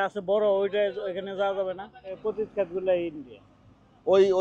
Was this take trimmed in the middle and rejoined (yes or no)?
yes